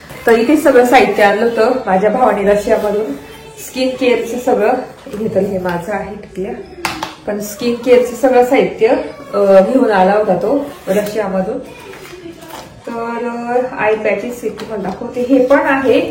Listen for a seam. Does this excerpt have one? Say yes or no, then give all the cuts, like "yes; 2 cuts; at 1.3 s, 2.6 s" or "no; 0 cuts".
no; 0 cuts